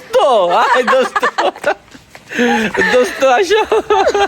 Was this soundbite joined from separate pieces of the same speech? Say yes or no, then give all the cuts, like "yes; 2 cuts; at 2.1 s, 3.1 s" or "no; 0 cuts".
no; 0 cuts